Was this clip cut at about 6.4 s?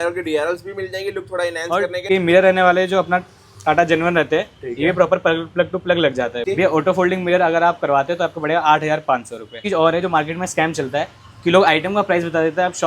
yes; 3 cuts; at 2.0 s, 6.4 s, 9.6 s

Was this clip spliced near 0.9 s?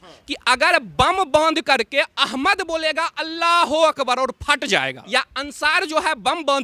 no; 1 cut; at 5.0 s

